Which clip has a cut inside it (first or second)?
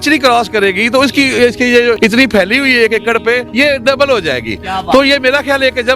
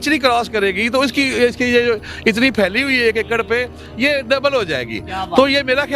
first